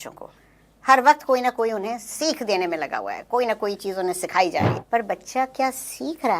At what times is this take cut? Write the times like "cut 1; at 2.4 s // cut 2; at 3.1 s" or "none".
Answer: cut 1; at 4.8 s